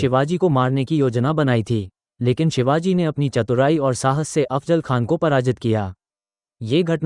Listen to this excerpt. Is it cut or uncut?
uncut